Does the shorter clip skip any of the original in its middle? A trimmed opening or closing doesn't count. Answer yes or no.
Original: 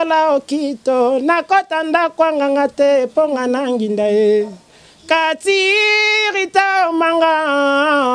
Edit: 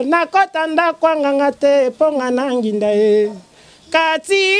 no